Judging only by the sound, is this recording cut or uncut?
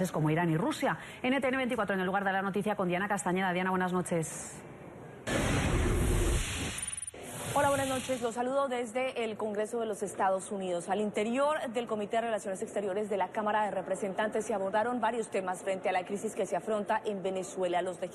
cut